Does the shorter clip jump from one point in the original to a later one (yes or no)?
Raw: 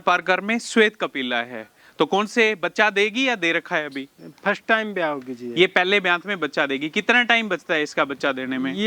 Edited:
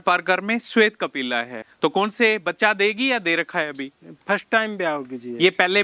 yes